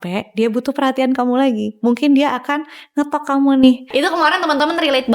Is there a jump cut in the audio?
yes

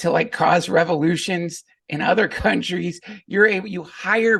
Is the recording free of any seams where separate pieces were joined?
yes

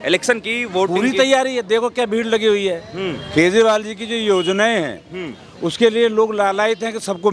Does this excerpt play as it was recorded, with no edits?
yes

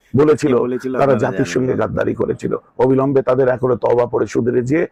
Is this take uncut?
yes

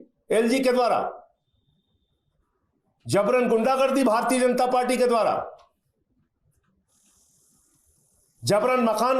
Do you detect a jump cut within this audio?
no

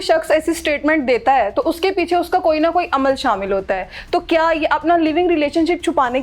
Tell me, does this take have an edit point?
no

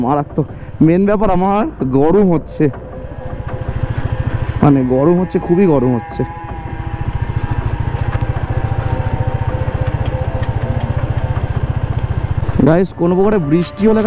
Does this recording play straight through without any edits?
no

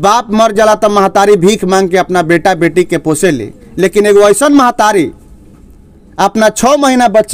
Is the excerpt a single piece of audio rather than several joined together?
yes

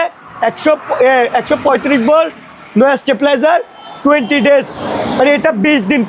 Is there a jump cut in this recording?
no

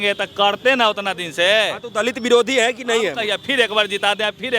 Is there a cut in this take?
no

